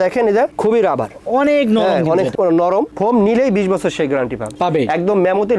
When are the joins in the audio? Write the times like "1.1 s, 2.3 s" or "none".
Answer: 2.9 s, 4.4 s